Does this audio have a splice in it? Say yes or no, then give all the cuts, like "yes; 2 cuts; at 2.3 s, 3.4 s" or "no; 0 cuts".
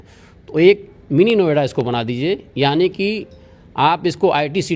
no; 0 cuts